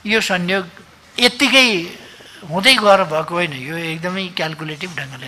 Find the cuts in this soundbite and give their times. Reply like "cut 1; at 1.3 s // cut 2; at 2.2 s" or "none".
none